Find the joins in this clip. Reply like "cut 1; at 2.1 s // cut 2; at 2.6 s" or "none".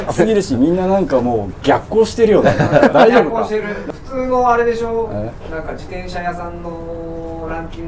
cut 1; at 3.8 s